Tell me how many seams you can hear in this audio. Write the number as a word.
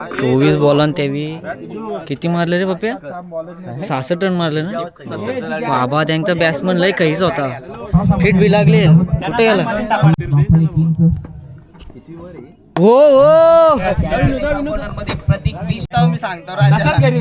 zero